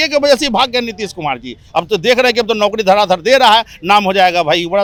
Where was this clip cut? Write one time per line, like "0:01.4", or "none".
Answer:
none